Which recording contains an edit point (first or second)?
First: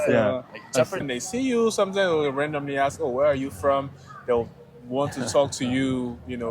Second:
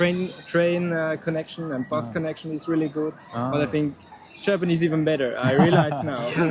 first